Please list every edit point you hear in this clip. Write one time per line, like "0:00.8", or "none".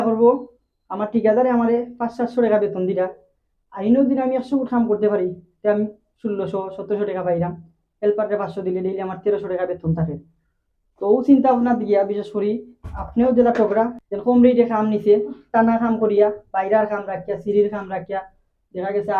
0:14.0

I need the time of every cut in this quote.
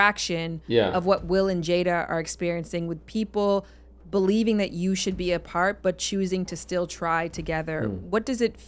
none

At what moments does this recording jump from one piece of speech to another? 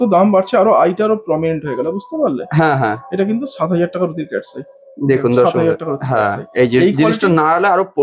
none

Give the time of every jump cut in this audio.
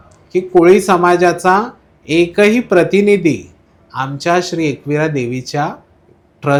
none

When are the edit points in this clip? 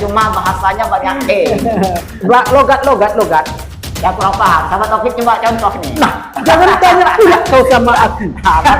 0:02.1

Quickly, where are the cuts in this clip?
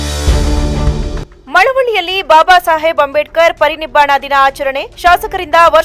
0:01.3

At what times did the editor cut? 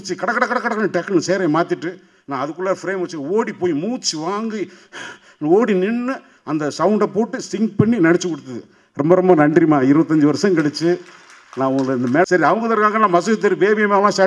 0:12.2

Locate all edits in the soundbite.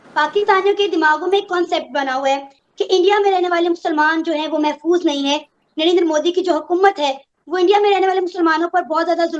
none

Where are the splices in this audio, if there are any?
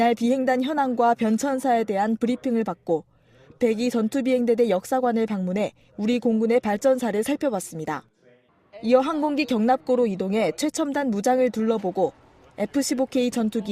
0:11.1

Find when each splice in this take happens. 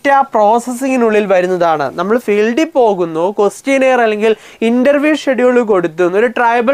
none

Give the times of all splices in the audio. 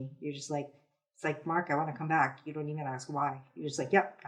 none

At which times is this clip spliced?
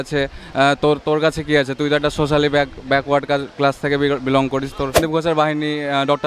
0:05.0

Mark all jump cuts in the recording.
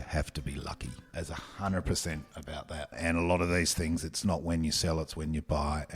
0:02.9

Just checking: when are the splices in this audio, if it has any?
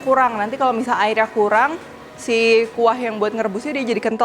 none

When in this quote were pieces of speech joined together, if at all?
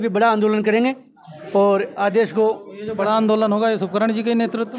none

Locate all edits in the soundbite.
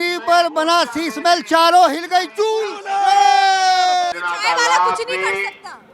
0:04.1

